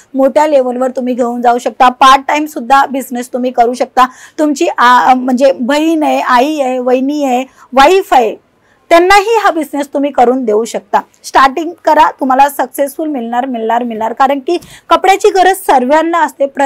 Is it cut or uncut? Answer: uncut